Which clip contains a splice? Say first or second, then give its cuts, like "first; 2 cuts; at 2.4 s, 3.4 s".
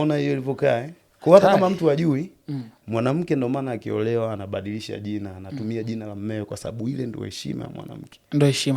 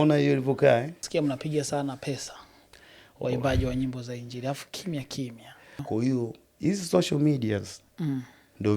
second; 2 cuts; at 1.0 s, 5.8 s